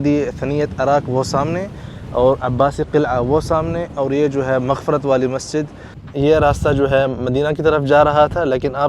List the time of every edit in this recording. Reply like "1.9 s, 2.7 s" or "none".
6.0 s